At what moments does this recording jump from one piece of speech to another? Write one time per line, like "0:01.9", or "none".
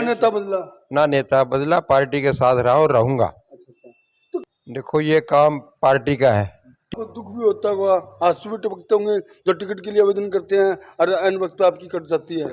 0:04.4
0:07.0